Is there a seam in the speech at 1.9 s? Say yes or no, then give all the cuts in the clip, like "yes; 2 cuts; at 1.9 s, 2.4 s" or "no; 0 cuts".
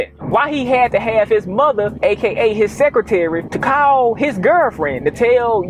yes; 1 cut; at 1.9 s